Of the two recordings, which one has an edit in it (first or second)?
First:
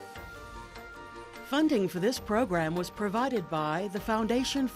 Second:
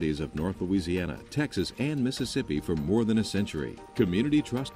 first